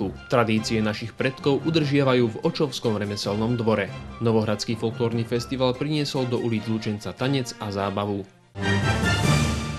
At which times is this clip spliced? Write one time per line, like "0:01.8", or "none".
0:04.0
0:08.4

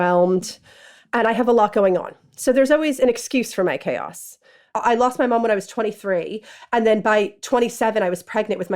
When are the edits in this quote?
0:04.7

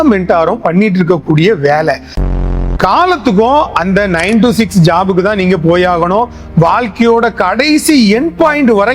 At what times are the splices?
0:02.3

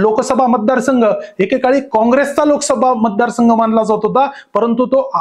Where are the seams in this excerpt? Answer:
none

